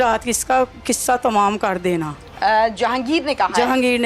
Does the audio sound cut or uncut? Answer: uncut